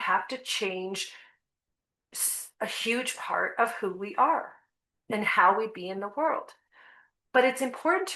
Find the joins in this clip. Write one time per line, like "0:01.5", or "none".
none